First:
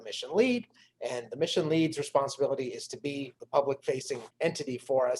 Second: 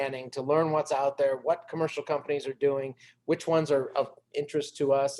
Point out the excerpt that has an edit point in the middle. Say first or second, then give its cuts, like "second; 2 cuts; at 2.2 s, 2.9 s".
first; 2 cuts; at 3.4 s, 4.3 s